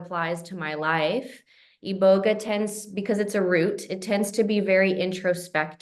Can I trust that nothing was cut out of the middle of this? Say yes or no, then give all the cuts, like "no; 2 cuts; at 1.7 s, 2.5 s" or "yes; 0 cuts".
yes; 0 cuts